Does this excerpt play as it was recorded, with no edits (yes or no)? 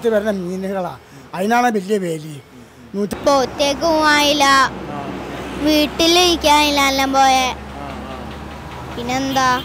no